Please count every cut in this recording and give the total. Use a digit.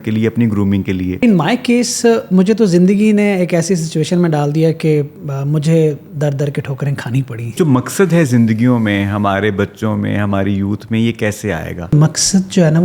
3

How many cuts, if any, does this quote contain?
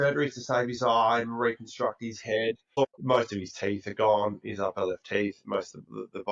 1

